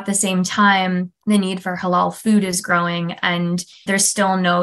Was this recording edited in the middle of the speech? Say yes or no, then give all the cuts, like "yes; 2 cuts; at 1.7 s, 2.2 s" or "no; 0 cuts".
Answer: yes; 2 cuts; at 1.1 s, 3.8 s